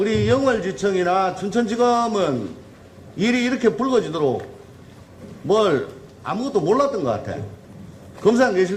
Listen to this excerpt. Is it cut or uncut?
uncut